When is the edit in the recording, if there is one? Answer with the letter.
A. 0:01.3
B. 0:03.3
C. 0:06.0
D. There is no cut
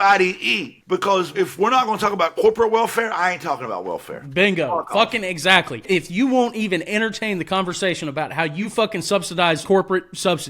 A